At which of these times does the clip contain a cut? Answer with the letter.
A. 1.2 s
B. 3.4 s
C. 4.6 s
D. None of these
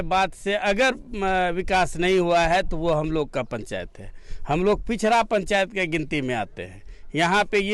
D